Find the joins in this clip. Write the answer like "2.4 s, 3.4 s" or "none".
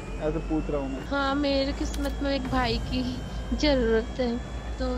1.0 s